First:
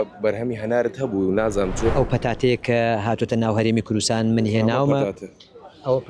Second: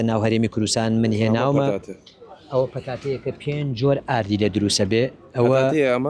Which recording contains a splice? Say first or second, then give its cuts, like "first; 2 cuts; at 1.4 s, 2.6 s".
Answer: first; 1 cut; at 1.9 s